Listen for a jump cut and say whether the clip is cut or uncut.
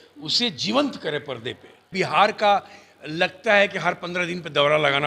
cut